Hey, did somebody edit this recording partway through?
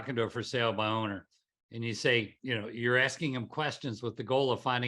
yes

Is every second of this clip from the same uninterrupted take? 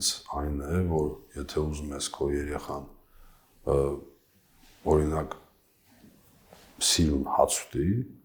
yes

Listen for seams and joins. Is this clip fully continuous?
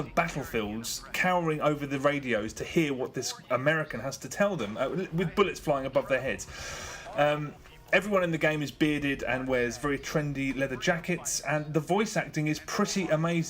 no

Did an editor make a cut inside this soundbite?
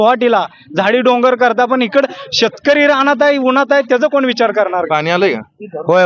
yes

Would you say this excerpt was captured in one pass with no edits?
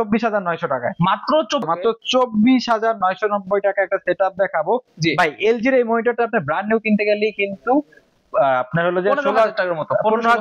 no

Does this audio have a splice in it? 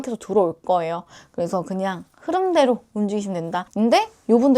yes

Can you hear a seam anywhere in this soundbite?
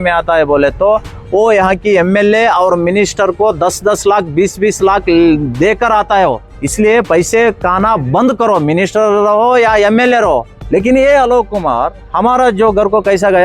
yes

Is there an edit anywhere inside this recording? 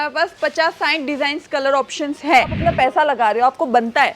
yes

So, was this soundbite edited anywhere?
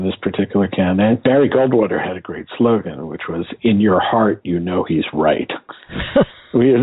yes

